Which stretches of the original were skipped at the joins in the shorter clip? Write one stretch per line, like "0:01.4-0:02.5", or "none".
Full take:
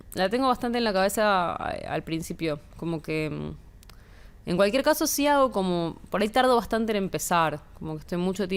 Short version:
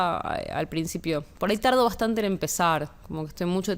0:02.7-0:06.0